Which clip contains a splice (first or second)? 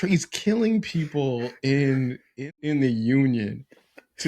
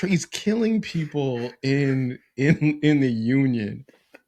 first